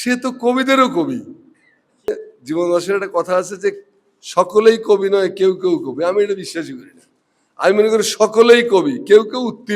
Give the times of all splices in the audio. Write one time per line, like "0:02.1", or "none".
0:02.2